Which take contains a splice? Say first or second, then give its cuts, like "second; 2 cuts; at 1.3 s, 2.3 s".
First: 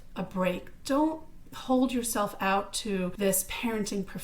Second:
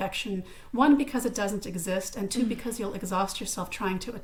first; 1 cut; at 3.1 s